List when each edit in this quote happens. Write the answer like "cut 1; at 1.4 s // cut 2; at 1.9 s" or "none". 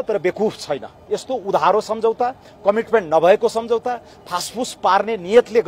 cut 1; at 0.9 s